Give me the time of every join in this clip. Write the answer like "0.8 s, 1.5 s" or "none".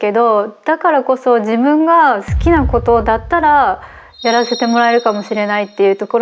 none